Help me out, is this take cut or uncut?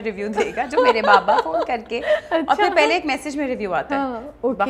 uncut